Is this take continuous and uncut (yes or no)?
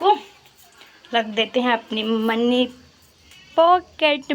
yes